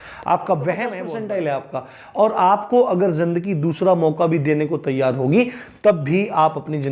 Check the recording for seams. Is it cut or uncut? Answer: cut